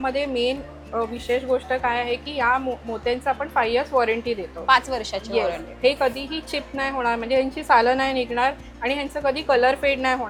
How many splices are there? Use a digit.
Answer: 0